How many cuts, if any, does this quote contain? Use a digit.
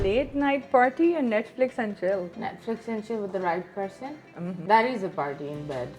2